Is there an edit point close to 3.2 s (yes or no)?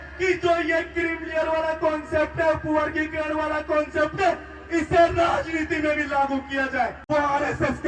no